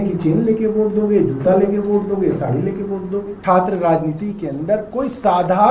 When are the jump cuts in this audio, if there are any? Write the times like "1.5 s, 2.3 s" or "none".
3.4 s